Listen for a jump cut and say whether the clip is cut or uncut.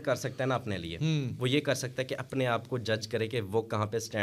uncut